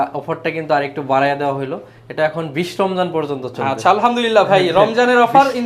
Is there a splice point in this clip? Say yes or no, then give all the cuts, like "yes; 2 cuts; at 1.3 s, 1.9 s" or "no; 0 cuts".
no; 0 cuts